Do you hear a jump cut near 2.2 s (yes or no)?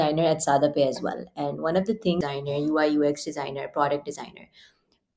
yes